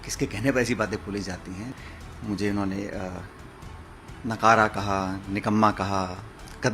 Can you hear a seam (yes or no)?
yes